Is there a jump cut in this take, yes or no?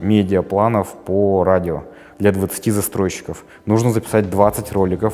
no